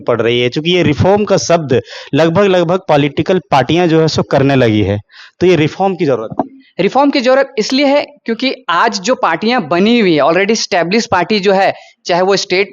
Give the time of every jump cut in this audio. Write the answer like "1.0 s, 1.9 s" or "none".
none